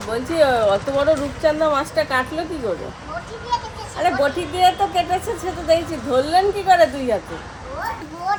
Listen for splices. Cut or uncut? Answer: uncut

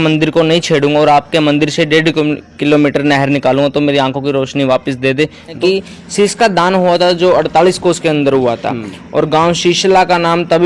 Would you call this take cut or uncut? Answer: cut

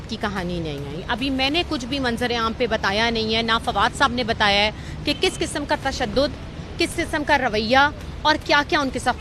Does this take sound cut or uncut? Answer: uncut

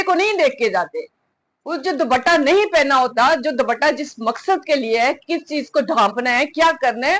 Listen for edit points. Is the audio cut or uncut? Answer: uncut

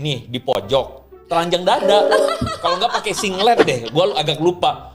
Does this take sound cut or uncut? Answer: uncut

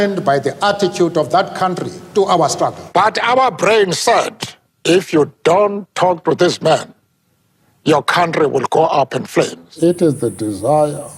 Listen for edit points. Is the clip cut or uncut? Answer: cut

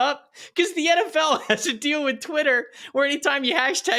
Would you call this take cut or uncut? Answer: uncut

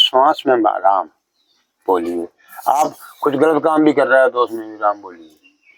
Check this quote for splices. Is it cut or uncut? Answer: uncut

